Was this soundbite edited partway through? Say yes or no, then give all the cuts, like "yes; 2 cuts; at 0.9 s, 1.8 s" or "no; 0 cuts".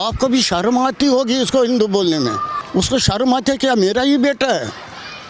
no; 0 cuts